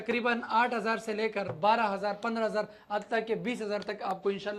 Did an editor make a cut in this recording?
no; 0 cuts

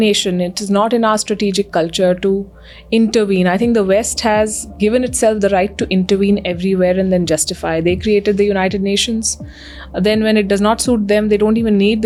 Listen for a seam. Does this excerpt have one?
no; 0 cuts

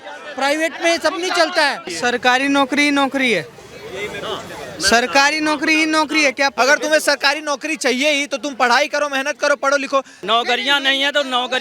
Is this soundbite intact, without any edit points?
no; 3 cuts; at 1.9 s, 6.5 s, 10.1 s

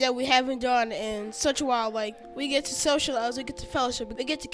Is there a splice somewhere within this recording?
no; 0 cuts

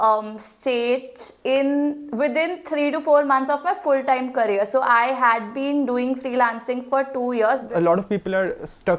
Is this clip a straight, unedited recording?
no; 1 cut; at 7.7 s

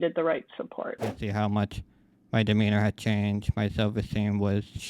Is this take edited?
yes; 1 cut; at 1.0 s

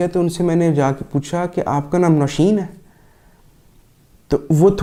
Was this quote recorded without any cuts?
yes; 0 cuts

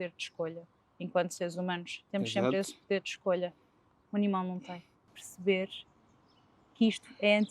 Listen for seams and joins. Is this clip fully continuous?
no; 1 cut; at 5.3 s

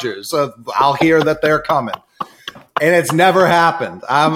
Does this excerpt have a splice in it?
no; 0 cuts

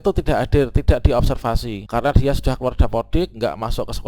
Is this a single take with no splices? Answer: no; 1 cut; at 1.7 s

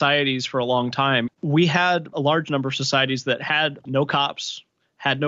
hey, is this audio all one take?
no; 3 cuts; at 1.3 s, 2.1 s, 3.8 s

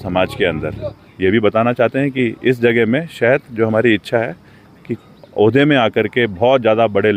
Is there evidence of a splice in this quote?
yes; 1 cut; at 1.0 s

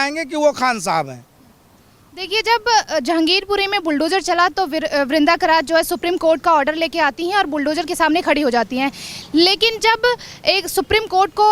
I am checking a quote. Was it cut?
no; 0 cuts

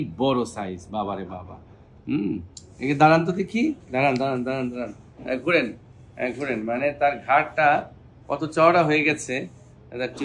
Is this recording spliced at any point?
no; 0 cuts

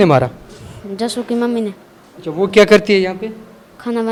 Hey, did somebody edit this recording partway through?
no; 0 cuts

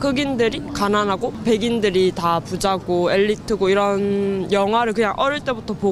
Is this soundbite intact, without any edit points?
yes; 0 cuts

